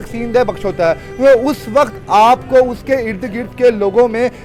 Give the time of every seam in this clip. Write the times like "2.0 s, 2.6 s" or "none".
none